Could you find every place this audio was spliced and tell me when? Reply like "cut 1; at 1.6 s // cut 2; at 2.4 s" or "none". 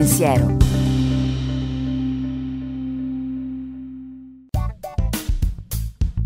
cut 1; at 4.3 s